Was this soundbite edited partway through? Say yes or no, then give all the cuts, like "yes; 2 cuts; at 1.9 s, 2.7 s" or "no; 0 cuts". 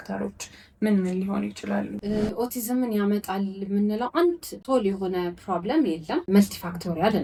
no; 0 cuts